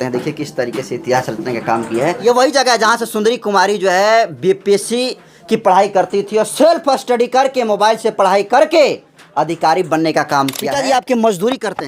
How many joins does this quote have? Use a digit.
2